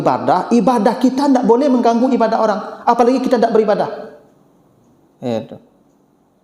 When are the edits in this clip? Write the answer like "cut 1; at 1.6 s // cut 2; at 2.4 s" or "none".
none